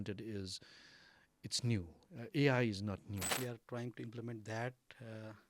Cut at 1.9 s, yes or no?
no